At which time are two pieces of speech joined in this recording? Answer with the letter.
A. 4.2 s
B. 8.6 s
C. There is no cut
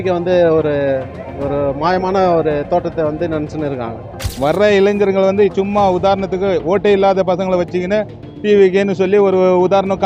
A